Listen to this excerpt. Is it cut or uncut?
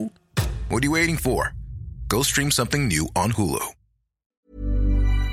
cut